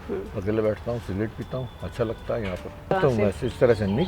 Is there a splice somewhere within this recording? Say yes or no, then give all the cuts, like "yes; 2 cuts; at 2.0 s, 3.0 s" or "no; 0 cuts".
yes; 1 cut; at 2.9 s